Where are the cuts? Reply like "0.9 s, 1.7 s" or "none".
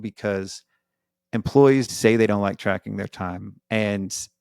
1.9 s